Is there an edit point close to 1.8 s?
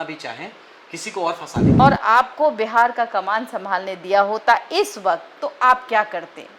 yes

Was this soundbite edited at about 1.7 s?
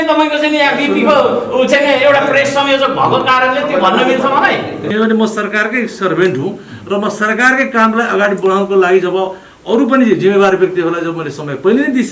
no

